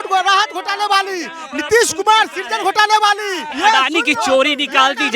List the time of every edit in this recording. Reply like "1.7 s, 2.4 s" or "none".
3.5 s